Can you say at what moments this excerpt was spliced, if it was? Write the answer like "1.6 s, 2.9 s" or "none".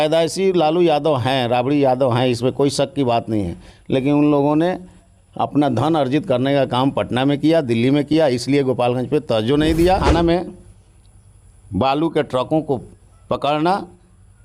10.0 s